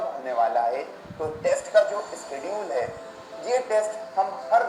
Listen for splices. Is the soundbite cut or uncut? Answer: uncut